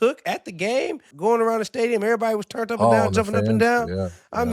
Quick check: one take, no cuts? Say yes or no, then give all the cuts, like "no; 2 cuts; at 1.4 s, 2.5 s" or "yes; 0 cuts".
no; 1 cut; at 1.1 s